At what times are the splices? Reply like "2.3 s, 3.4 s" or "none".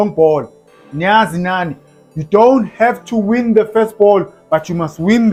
none